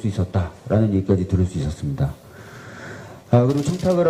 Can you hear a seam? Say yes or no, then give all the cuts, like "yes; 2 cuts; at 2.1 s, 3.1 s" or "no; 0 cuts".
no; 0 cuts